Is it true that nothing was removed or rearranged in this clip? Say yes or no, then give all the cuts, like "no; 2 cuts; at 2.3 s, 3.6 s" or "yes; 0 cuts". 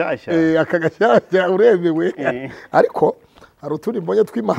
yes; 0 cuts